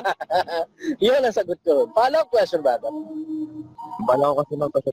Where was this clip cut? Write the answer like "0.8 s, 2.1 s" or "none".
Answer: 3.9 s